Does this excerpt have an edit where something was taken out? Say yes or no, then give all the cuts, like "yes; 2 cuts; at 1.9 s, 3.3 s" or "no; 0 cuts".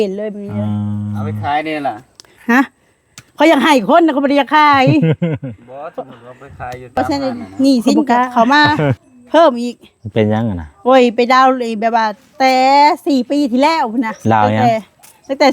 yes; 1 cut; at 7.0 s